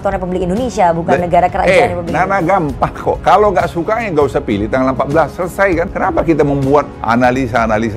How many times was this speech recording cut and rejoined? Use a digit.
3